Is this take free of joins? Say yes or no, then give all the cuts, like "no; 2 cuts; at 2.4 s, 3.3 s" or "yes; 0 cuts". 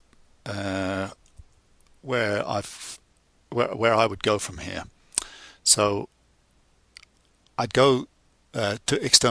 no; 1 cut; at 2.7 s